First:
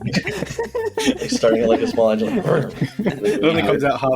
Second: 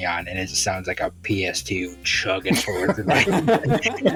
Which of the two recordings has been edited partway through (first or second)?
first